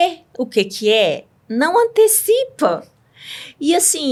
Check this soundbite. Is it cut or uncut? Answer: uncut